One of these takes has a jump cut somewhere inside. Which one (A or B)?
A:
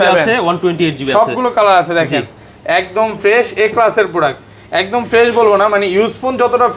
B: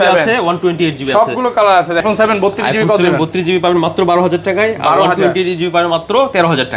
B